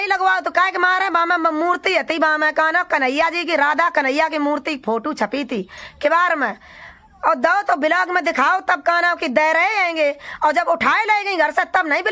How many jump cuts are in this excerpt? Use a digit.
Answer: 0